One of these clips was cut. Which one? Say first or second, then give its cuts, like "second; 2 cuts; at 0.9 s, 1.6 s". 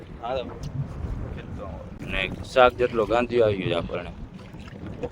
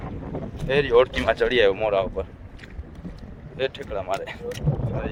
first; 1 cut; at 2.0 s